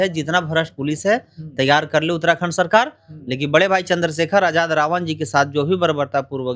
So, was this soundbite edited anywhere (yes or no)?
no